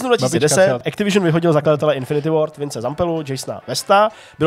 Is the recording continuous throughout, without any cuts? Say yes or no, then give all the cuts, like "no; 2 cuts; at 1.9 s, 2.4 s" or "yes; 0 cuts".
no; 1 cut; at 0.9 s